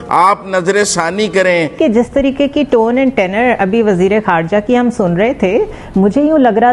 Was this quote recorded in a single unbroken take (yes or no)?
no